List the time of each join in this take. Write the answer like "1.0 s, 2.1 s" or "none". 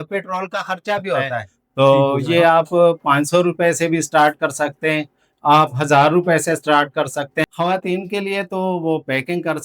1.6 s, 7.5 s